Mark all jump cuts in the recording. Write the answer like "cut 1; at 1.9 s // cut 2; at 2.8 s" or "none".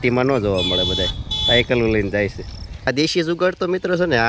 cut 1; at 2.9 s